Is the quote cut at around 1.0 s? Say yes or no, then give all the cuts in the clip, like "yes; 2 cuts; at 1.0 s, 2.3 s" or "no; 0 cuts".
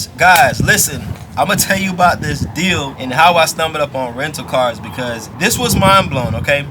no; 2 cuts; at 3.0 s, 5.3 s